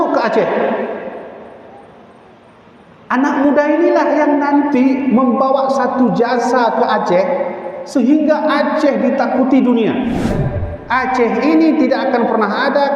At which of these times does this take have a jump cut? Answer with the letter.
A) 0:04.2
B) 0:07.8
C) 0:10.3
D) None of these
C